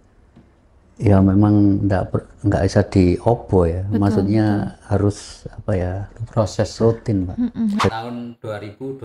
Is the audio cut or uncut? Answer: cut